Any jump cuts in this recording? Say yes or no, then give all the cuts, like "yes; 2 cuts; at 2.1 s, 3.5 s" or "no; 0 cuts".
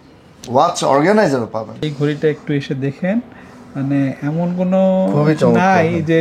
yes; 1 cut; at 1.8 s